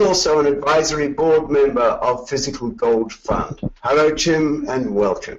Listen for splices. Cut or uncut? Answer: cut